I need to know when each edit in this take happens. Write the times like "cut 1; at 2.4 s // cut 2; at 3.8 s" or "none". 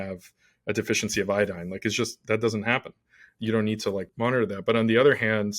cut 1; at 3.3 s // cut 2; at 4.1 s

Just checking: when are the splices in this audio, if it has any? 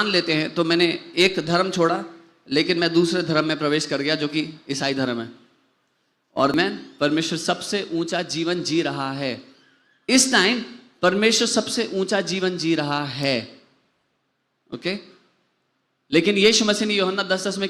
cut 1; at 6.5 s

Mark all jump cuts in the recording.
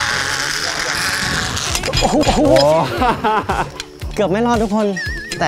none

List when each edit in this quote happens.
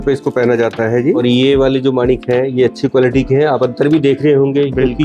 cut 1; at 1.2 s

